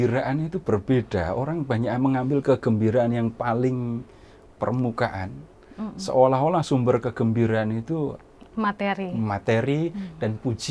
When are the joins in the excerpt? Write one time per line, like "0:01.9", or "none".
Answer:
none